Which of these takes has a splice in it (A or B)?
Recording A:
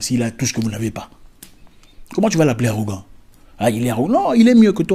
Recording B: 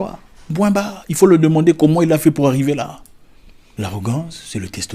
B